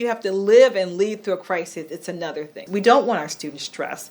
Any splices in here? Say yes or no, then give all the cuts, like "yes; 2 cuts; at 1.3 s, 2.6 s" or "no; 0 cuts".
yes; 1 cut; at 2.7 s